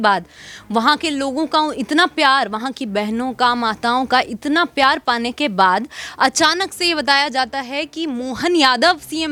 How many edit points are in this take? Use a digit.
0